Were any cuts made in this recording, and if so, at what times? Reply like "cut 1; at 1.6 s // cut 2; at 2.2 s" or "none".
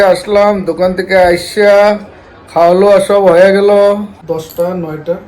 cut 1; at 4.2 s